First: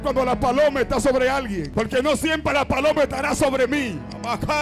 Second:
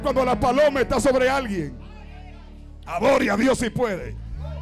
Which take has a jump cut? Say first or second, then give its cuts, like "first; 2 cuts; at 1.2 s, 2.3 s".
first; 1 cut; at 1.7 s